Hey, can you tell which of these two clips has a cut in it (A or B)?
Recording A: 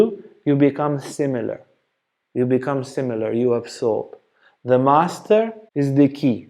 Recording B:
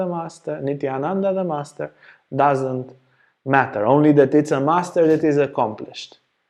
A